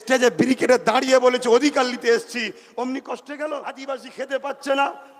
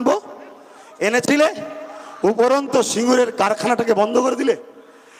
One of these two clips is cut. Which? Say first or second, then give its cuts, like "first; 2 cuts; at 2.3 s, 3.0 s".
first; 1 cut; at 3.8 s